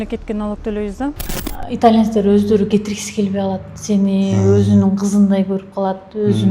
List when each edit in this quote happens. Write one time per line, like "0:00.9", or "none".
0:01.2